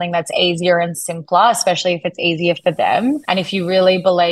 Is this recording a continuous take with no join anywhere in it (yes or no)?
no